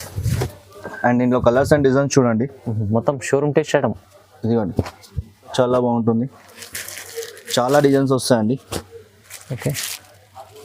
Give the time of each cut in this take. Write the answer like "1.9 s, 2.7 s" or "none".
5.5 s